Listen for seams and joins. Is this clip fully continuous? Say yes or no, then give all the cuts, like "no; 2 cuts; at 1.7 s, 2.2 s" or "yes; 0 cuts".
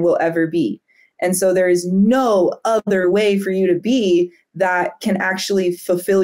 yes; 0 cuts